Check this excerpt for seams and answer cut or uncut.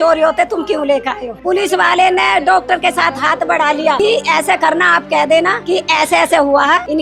cut